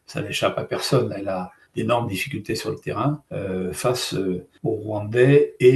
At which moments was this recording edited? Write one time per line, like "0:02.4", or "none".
0:03.3
0:04.5